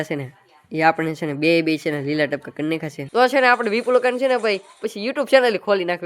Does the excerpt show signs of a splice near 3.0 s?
yes; 1 cut; at 3.0 s

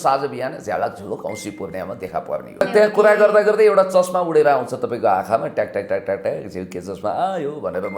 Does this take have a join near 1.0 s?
no; 1 cut; at 2.6 s

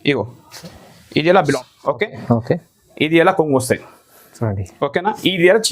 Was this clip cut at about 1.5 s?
yes; 1 cut; at 1.5 s

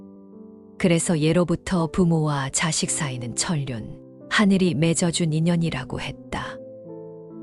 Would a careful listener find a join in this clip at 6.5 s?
yes; 1 cut; at 6.5 s

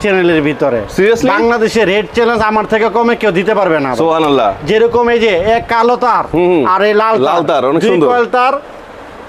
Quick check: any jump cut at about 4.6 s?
no; 0 cuts

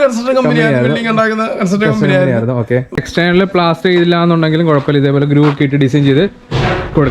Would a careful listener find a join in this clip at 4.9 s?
no; 1 cut; at 3.0 s

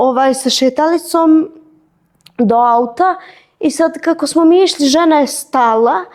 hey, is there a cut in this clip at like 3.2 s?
no; 0 cuts

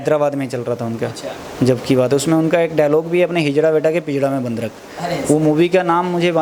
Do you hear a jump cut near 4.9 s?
no; 0 cuts

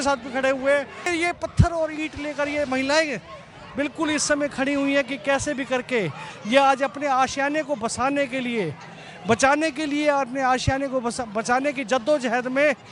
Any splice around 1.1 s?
yes; 1 cut; at 1.1 s

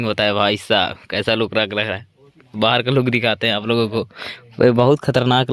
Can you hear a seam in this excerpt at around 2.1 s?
no; 0 cuts

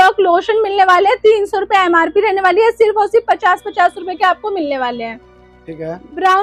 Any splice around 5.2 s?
no; 0 cuts

